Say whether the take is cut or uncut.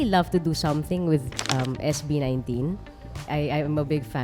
cut